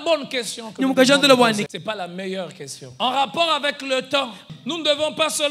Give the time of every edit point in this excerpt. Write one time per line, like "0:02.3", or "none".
0:01.7
0:02.8
0:04.5